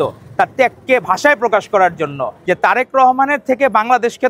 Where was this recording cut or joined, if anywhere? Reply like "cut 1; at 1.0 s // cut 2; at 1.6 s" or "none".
cut 1; at 2.3 s